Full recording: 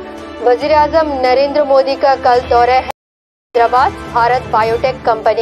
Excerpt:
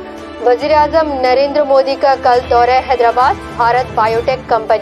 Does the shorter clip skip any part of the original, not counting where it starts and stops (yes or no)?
yes